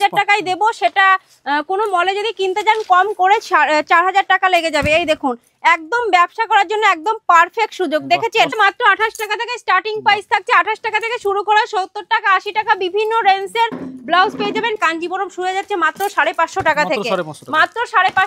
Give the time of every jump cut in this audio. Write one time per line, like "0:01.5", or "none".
0:08.5
0:14.8